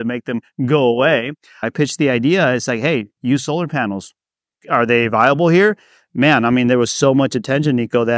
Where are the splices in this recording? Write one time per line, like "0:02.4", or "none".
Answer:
0:01.7